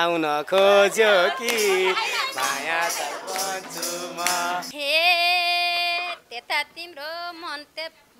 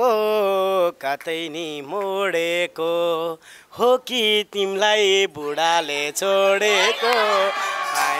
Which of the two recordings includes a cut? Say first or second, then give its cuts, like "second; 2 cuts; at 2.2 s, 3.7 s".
first; 1 cut; at 4.7 s